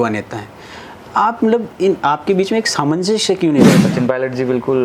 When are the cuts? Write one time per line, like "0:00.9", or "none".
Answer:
0:03.8